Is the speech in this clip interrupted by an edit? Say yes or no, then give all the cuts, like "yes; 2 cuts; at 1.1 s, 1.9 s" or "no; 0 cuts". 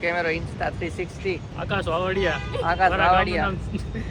yes; 1 cut; at 1.5 s